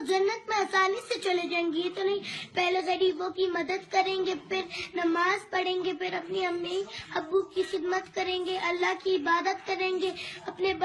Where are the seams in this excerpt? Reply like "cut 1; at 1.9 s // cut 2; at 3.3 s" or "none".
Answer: cut 1; at 1.4 s